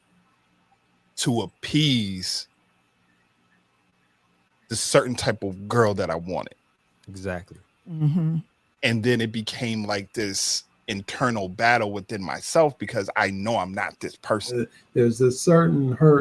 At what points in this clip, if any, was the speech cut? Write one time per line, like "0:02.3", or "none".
0:14.6